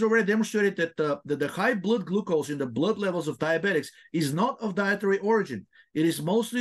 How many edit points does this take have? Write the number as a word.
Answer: zero